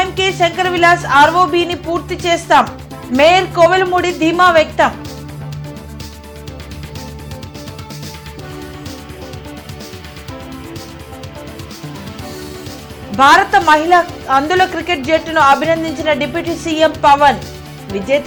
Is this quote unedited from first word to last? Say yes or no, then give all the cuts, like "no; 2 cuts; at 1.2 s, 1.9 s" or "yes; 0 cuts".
yes; 0 cuts